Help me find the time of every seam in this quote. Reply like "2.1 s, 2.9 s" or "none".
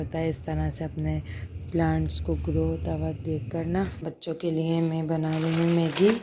4.1 s